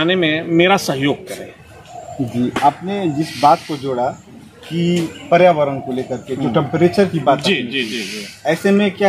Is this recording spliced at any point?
no; 0 cuts

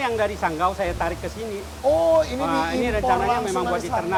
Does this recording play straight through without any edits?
yes; 0 cuts

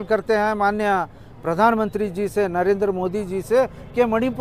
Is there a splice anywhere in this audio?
no; 0 cuts

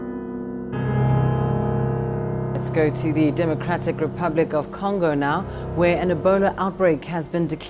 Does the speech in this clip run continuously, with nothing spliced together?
no; 1 cut; at 4.1 s

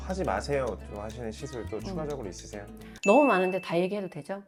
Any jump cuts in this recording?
no; 0 cuts

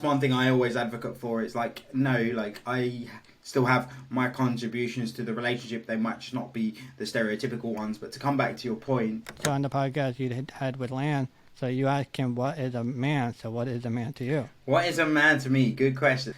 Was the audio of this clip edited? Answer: yes; 1 cut; at 9.3 s

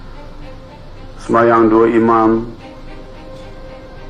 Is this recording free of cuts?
yes; 0 cuts

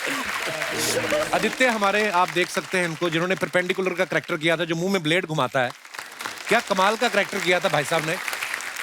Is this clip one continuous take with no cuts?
no; 1 cut; at 1.3 s

